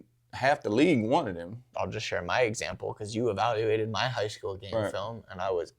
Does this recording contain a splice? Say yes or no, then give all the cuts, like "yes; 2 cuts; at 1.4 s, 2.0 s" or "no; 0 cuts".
yes; 1 cut; at 1.7 s